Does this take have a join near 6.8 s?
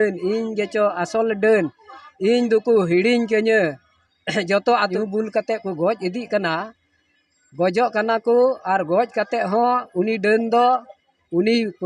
no; 1 cut; at 4.9 s

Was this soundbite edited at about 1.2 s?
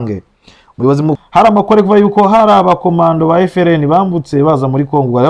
yes; 1 cut; at 1.2 s

